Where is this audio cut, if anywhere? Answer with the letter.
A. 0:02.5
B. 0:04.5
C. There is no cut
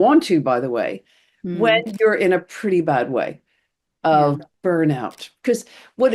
B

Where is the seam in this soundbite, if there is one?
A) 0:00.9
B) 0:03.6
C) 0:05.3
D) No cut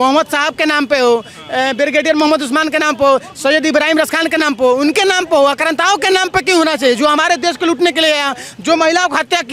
D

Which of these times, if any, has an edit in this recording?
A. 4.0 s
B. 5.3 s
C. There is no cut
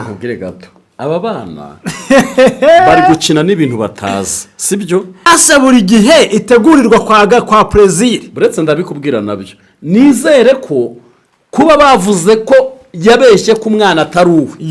B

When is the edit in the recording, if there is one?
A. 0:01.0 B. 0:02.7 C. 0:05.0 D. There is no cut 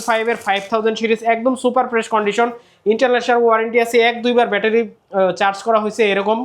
D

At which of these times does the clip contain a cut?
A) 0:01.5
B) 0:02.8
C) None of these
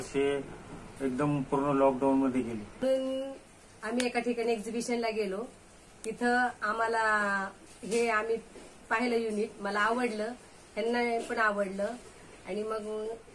B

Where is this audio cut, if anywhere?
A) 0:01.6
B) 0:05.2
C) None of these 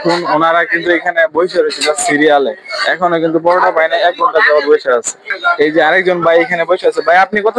C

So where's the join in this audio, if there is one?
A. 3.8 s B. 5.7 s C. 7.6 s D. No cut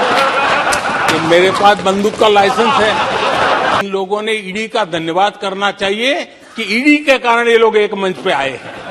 A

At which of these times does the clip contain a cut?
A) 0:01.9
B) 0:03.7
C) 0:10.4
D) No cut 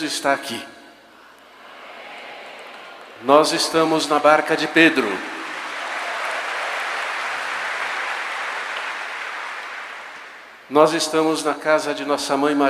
A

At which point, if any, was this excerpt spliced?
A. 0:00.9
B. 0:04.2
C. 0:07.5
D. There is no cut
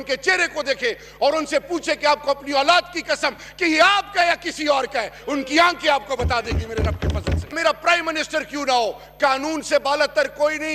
C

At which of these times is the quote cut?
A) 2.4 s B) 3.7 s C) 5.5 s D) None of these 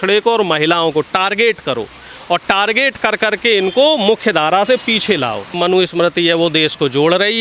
C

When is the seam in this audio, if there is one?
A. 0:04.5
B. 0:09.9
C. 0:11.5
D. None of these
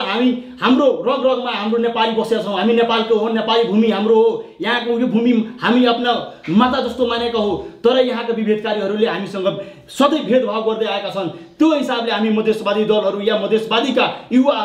D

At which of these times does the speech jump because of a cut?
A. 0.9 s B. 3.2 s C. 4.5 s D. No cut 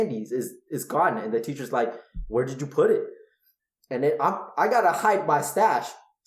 D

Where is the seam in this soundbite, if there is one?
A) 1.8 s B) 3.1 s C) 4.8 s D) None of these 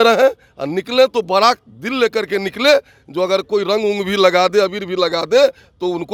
D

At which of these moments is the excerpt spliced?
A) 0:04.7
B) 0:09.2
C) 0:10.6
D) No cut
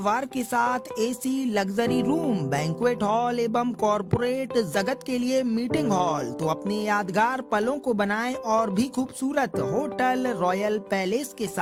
D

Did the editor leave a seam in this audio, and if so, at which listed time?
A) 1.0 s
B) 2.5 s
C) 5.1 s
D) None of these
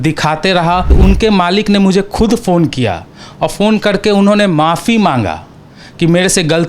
A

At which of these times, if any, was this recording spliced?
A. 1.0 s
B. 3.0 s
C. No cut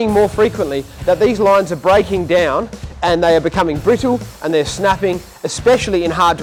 C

